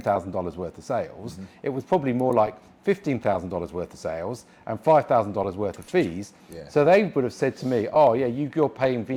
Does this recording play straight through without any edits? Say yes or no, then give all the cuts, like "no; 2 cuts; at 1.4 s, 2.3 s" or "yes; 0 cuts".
yes; 0 cuts